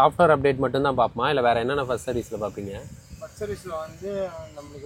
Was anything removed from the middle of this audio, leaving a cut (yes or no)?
no